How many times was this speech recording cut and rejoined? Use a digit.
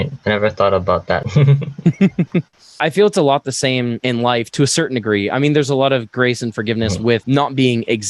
2